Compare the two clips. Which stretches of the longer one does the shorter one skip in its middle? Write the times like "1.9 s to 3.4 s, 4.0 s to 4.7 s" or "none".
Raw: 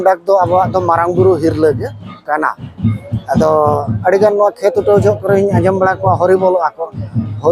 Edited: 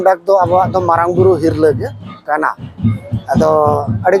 none